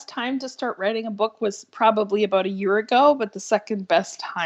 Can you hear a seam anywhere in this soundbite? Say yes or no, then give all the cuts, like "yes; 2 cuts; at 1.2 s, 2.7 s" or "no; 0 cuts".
no; 0 cuts